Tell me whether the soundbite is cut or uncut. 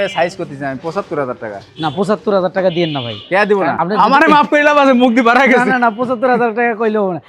cut